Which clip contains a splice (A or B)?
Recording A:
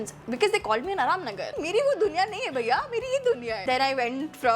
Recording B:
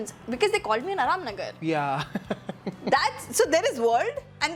A